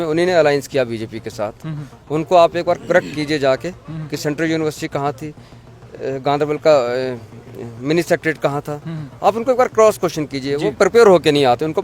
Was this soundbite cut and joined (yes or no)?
no